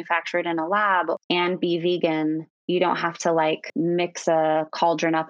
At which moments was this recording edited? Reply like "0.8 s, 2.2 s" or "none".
1.2 s, 2.5 s, 3.7 s